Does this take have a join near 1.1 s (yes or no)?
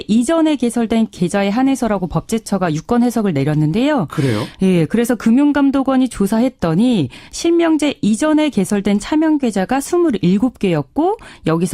yes